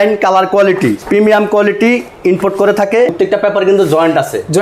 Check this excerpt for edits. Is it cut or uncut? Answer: cut